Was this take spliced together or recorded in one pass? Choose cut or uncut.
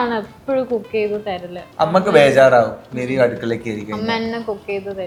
uncut